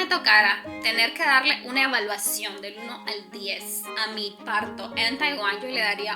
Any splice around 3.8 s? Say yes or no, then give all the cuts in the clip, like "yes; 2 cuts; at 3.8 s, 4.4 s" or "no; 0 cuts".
yes; 1 cut; at 3.8 s